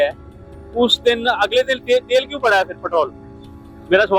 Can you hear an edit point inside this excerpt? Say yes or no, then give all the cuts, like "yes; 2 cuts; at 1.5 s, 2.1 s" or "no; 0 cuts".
no; 0 cuts